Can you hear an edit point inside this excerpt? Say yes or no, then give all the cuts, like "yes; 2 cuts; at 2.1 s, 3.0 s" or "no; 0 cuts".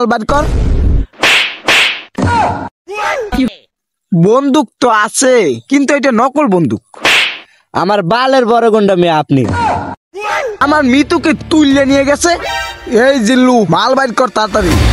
yes; 2 cuts; at 3.5 s, 10.6 s